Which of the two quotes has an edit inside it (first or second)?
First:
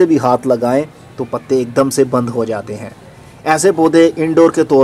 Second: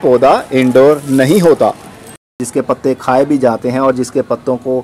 second